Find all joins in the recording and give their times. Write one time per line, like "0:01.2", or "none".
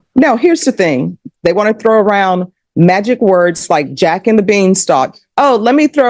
0:01.2